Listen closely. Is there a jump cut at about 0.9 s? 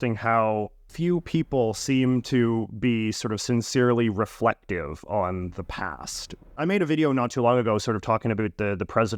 yes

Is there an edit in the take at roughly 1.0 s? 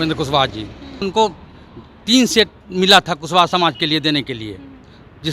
yes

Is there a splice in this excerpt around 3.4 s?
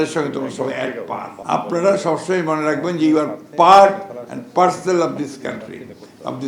no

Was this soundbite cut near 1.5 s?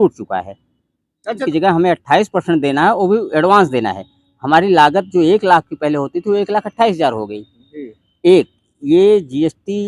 yes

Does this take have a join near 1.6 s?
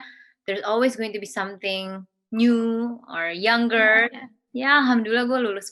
no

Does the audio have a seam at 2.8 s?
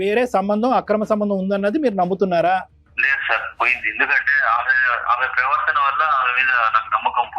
yes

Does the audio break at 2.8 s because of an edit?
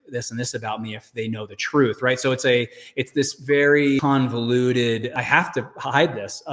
no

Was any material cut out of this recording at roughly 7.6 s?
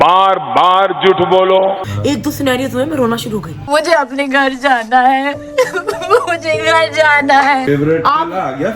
yes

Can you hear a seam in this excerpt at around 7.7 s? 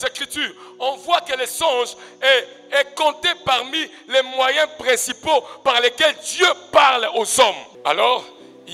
yes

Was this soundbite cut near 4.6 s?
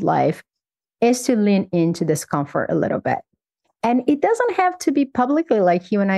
no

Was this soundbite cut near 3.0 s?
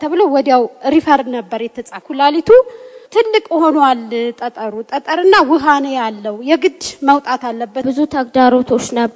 yes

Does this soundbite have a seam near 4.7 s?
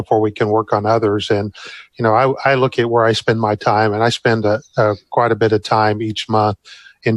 no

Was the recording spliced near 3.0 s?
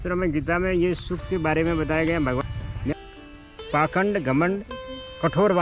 yes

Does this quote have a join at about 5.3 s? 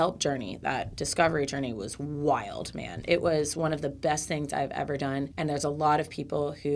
yes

